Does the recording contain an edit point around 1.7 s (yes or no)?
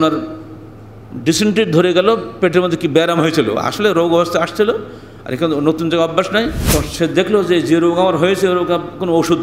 no